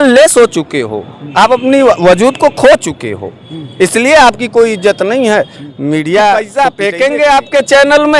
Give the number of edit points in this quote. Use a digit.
1